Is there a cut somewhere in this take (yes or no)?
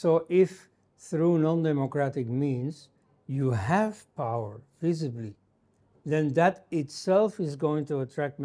no